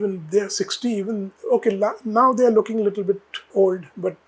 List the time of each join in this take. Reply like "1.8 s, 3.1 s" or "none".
1.3 s, 3.3 s